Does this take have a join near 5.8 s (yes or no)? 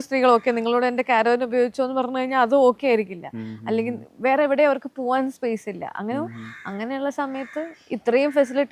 no